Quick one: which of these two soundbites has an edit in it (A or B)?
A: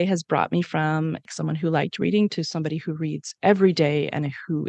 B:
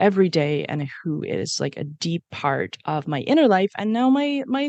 A